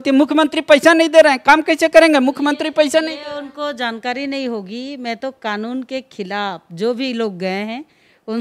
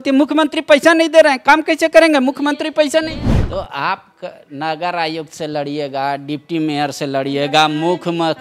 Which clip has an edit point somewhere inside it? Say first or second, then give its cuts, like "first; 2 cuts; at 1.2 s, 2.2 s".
second; 1 cut; at 3.3 s